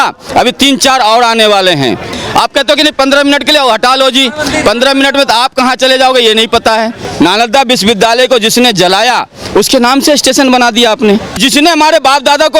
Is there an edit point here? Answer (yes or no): yes